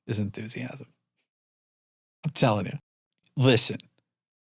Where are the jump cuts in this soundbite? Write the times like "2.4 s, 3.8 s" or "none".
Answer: 2.7 s

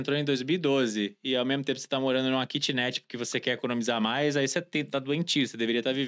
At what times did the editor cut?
none

